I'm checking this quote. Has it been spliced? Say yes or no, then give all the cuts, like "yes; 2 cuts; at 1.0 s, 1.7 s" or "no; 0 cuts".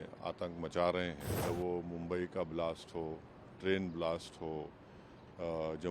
yes; 1 cut; at 1.3 s